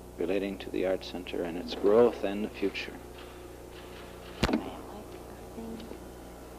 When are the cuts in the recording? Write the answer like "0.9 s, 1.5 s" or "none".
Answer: 1.7 s